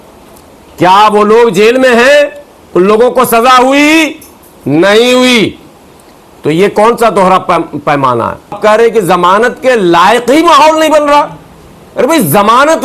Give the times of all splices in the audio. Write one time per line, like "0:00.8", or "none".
0:08.6